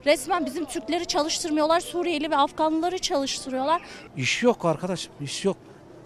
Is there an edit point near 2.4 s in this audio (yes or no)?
no